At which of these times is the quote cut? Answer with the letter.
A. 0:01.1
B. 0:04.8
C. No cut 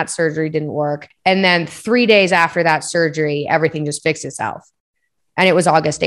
A